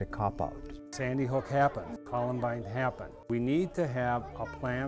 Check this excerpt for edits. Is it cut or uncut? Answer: cut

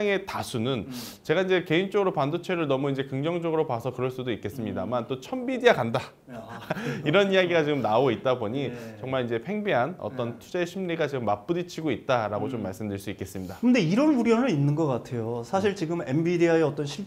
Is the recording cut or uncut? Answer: uncut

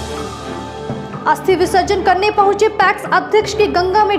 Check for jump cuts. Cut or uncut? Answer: uncut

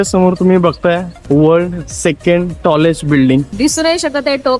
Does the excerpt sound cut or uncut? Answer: cut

